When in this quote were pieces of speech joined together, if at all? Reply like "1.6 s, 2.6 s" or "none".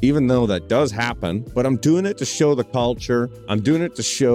1.4 s, 3.1 s